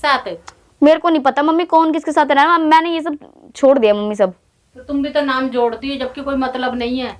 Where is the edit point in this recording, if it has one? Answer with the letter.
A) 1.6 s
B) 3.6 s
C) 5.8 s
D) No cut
D